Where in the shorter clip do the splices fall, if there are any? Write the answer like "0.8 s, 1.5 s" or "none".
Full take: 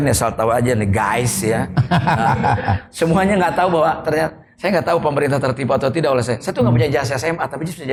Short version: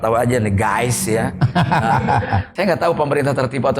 2.4 s

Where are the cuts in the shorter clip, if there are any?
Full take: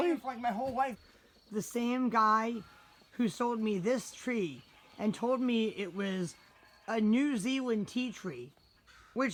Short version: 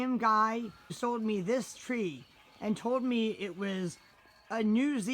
1.0 s

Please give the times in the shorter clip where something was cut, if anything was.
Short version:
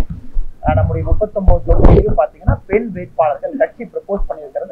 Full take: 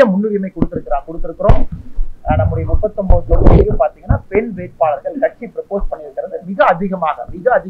none

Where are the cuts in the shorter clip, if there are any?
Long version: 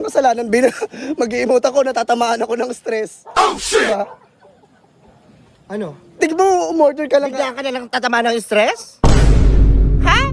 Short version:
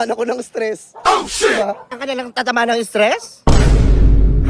2.0 s

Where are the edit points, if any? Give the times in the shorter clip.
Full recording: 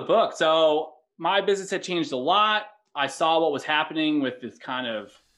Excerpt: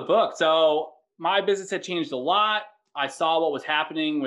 none

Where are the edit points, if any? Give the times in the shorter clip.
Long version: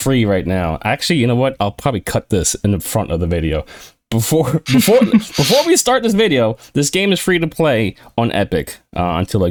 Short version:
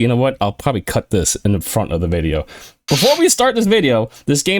2.8 s

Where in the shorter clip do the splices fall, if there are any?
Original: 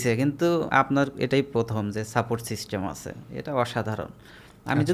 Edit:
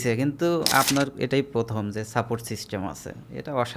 none

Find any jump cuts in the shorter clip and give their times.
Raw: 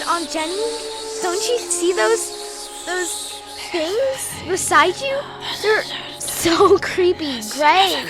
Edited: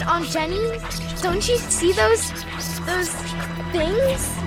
none

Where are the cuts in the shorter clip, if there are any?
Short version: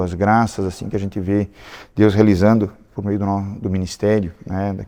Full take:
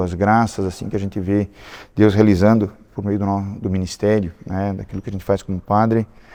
none

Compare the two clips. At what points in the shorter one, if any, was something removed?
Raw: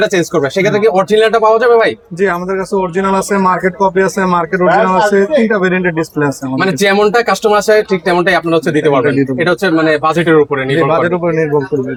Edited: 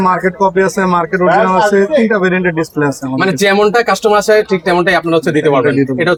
none

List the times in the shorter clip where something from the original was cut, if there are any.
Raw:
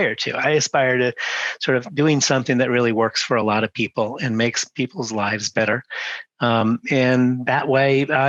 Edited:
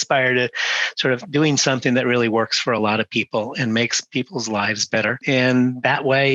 5.2 s

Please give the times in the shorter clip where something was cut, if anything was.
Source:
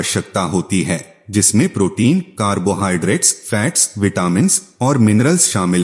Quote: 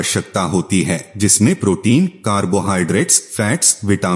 1.1 s

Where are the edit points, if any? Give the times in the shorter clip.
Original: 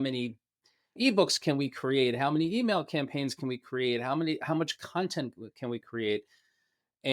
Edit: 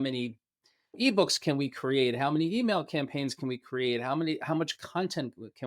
none

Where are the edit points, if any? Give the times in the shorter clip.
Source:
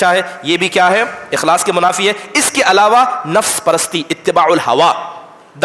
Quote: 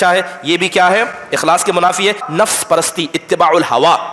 2.2 s

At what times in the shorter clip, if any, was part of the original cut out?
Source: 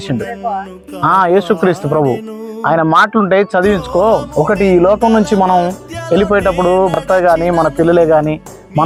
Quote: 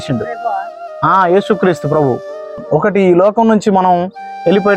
2.6 s

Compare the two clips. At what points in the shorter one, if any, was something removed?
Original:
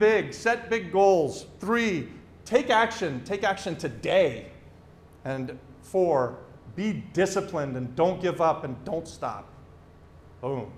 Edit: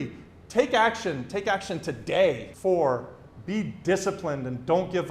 2.5 s

